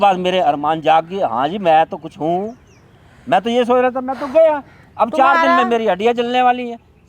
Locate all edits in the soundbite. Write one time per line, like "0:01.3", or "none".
none